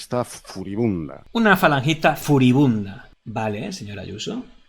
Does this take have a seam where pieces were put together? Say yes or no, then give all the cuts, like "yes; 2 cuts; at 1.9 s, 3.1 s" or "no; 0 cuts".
yes; 1 cut; at 1.2 s